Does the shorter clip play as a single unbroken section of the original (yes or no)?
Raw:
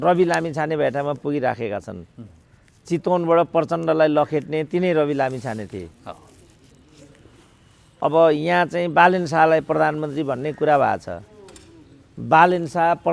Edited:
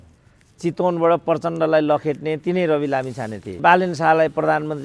no